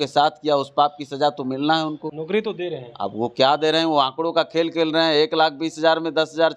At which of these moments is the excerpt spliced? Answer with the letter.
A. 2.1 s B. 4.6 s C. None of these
A